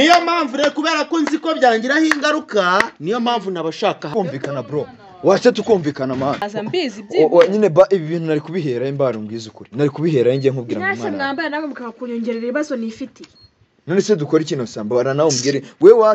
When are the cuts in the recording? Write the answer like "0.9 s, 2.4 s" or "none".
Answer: 4.1 s, 6.5 s

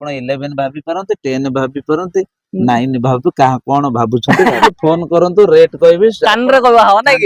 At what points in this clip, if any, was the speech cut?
4.7 s

